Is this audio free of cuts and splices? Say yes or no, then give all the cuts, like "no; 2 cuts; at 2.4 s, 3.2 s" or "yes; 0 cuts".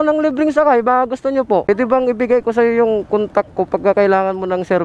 no; 1 cut; at 1.6 s